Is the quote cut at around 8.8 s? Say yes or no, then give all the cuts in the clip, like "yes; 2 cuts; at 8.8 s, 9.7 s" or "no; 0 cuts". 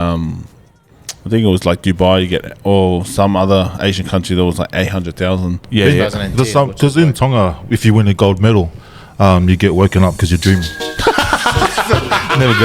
no; 1 cut; at 5.6 s